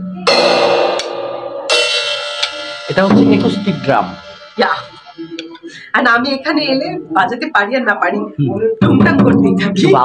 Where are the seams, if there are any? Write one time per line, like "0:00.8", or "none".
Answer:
none